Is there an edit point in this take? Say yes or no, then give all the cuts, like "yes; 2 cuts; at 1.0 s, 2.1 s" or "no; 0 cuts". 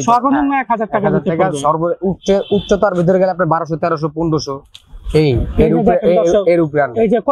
no; 0 cuts